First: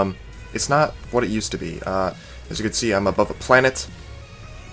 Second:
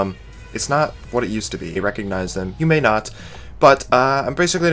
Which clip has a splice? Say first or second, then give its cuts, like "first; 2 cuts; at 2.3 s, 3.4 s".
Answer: first; 1 cut; at 1.8 s